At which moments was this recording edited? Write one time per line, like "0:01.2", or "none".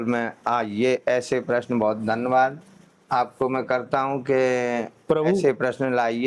none